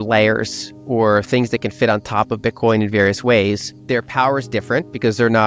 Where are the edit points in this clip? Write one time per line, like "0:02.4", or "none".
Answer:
0:03.7